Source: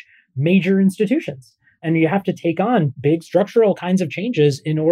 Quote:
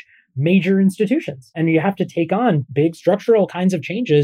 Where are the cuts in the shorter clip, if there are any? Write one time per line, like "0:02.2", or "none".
0:01.4